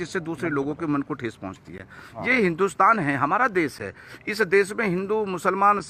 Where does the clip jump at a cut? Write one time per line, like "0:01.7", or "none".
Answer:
none

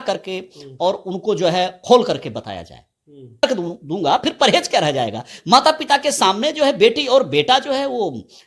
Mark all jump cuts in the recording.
0:03.4

